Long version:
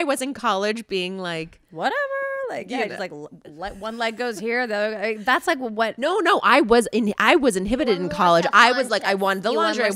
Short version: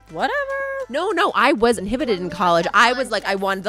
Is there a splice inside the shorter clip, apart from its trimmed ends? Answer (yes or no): yes